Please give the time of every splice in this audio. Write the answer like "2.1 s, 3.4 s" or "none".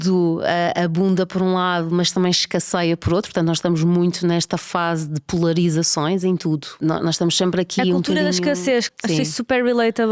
6.7 s, 8.9 s